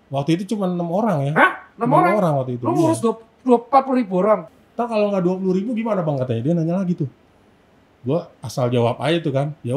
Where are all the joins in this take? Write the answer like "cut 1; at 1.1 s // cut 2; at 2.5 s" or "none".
cut 1; at 4.5 s